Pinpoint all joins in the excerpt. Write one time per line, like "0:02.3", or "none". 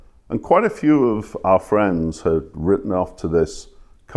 none